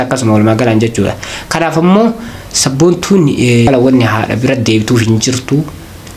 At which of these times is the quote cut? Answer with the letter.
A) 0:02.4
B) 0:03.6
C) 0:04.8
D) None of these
B